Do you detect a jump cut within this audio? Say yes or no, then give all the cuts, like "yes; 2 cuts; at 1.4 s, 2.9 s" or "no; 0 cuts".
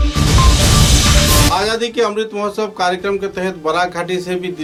no; 0 cuts